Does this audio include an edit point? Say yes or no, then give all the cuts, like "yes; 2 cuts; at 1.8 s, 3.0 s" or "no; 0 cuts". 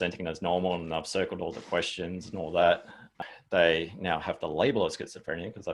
yes; 1 cut; at 3.2 s